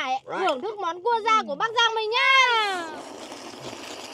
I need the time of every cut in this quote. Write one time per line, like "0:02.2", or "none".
0:02.7